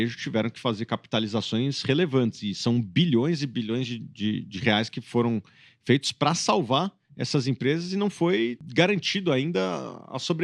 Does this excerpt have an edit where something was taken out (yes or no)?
no